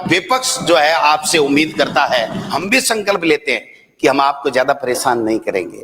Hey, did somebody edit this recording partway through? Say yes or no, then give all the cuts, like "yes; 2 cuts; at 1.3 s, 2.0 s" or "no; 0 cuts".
yes; 1 cut; at 2.4 s